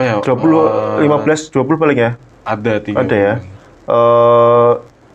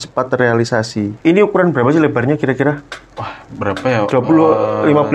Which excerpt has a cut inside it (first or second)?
second